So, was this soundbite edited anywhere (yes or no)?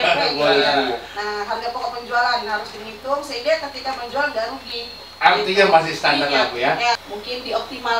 yes